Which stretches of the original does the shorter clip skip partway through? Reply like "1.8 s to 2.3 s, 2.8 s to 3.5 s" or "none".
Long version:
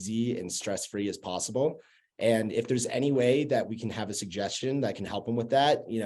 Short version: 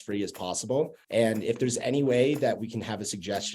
1.8 s to 2.1 s